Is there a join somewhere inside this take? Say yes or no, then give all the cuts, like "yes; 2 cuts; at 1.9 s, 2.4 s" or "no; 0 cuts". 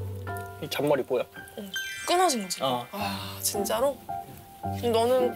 no; 0 cuts